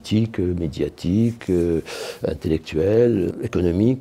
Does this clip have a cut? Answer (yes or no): no